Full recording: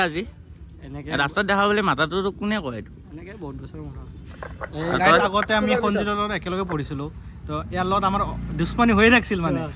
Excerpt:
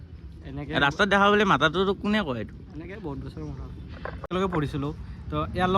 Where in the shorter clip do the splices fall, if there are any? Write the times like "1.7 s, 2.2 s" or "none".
4.2 s